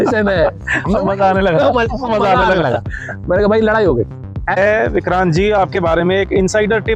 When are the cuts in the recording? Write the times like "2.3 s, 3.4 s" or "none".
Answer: 4.6 s